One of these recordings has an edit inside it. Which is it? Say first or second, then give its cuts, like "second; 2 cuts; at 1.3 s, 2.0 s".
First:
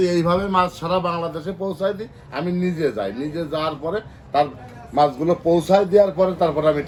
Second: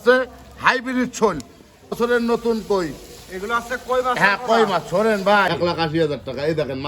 second; 2 cuts; at 1.9 s, 5.5 s